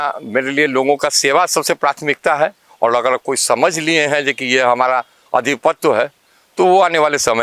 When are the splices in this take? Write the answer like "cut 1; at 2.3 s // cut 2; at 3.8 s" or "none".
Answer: none